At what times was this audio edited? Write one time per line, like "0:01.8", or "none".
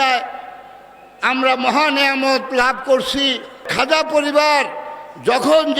0:03.7